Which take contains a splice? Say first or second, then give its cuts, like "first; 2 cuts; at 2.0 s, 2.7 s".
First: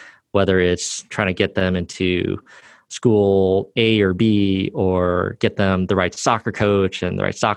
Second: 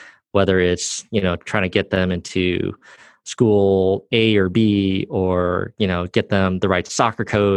first; 2 cuts; at 1.1 s, 5.3 s